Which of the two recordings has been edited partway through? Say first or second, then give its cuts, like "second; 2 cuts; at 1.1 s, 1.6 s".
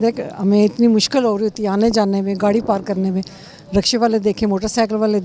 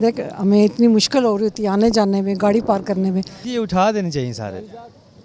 second; 1 cut; at 3.4 s